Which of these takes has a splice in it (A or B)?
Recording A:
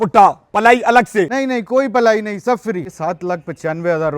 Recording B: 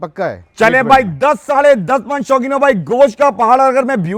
A